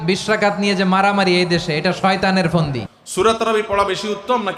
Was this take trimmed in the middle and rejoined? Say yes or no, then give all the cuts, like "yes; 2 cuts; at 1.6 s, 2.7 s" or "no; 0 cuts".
yes; 1 cut; at 2.9 s